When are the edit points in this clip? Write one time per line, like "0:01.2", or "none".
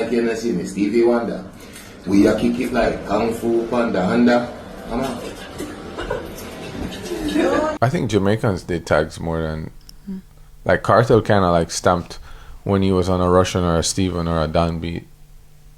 0:07.7